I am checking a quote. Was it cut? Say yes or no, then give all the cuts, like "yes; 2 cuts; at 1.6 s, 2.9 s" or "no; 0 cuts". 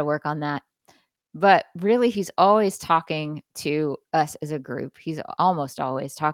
yes; 1 cut; at 5.3 s